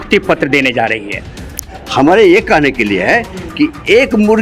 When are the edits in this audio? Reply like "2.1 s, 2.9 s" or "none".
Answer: 1.6 s